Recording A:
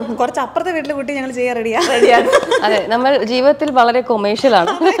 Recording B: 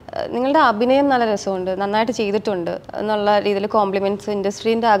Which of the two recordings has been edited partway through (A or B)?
B